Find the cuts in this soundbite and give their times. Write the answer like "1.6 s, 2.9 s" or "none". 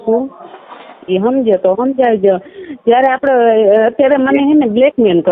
none